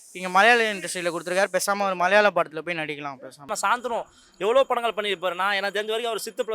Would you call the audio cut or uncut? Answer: cut